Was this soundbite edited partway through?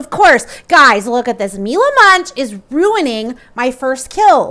no; 0 cuts

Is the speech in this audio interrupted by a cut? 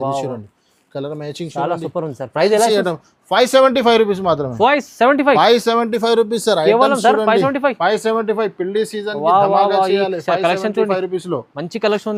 no; 0 cuts

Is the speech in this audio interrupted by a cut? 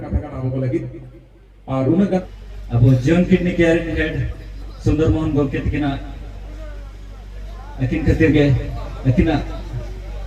yes; 1 cut; at 2.2 s

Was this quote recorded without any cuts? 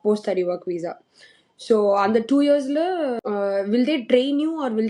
no; 1 cut; at 3.2 s

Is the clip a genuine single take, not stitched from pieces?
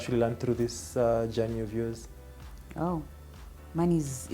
yes; 0 cuts

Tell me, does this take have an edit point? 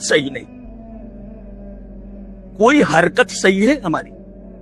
no; 0 cuts

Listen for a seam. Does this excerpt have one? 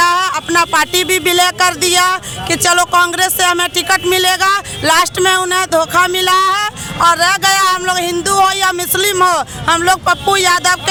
no; 0 cuts

